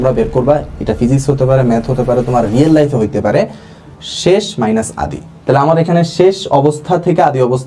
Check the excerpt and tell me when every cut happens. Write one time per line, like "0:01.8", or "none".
none